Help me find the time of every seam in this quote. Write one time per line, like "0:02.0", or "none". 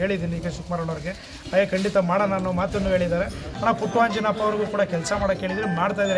0:03.5